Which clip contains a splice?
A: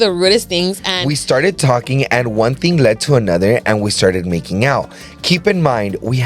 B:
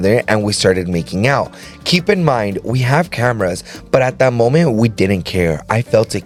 A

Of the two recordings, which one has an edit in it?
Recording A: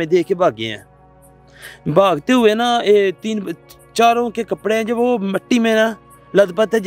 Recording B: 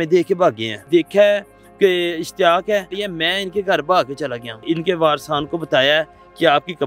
B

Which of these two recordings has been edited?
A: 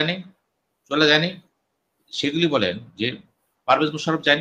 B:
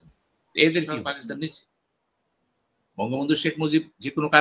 B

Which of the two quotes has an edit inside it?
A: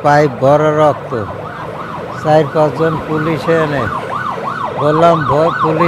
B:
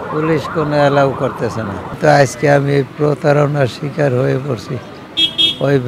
B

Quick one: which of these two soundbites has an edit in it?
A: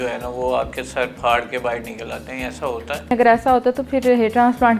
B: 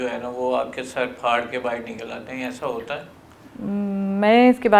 A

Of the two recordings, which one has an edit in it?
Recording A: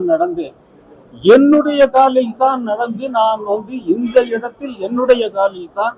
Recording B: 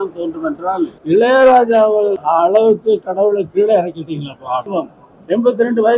B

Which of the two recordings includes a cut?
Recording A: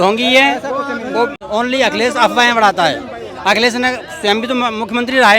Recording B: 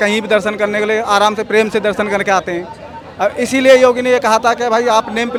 A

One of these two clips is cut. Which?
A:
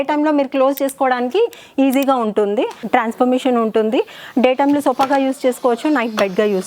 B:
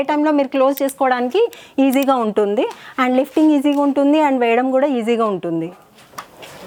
A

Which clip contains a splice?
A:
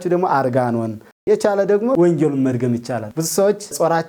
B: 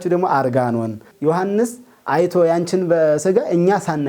B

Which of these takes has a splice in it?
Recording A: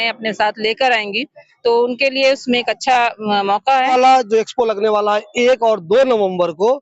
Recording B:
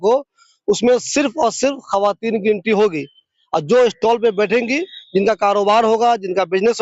A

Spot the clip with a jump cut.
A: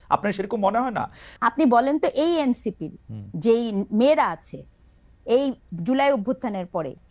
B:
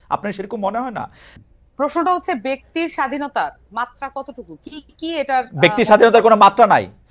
B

